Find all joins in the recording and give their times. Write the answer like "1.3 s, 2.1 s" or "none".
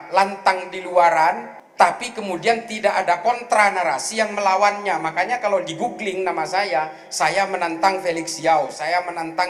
none